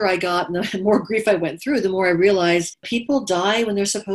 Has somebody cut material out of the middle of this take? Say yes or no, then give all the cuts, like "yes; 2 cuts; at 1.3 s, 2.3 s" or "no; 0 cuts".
yes; 1 cut; at 2.9 s